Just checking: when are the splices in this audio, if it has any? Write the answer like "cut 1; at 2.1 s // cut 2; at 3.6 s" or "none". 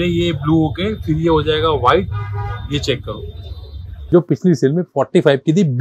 cut 1; at 3.9 s